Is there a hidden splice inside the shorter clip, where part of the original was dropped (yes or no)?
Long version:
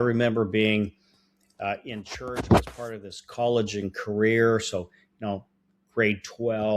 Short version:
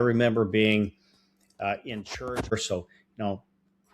yes